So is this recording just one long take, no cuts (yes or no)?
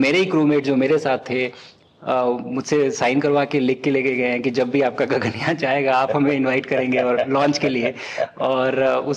yes